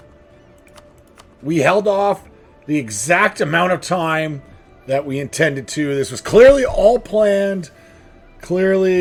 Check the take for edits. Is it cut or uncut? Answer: uncut